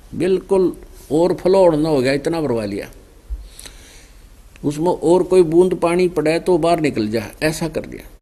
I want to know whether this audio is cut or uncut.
uncut